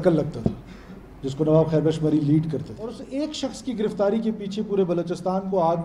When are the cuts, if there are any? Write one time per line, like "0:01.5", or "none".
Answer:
0:03.0